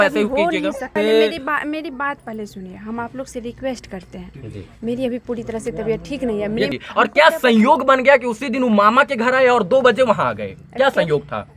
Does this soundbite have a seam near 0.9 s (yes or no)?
yes